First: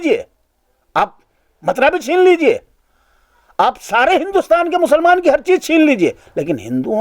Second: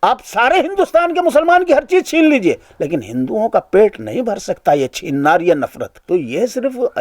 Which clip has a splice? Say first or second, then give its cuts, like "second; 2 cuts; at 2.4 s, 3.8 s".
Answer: second; 1 cut; at 5.9 s